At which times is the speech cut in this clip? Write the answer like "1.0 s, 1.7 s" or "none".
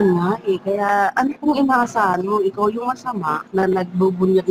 3.4 s